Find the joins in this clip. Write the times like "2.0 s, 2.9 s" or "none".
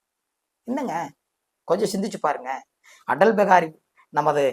none